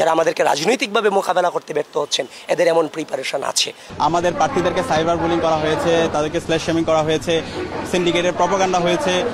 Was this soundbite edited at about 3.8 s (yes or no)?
yes